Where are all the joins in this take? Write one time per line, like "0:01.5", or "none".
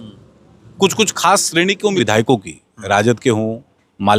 0:02.0